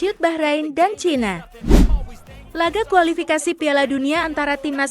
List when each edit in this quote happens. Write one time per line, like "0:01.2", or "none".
0:01.5